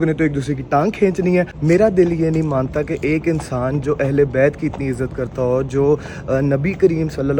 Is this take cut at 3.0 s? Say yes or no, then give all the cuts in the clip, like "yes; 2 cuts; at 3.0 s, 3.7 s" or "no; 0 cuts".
no; 1 cut; at 1.5 s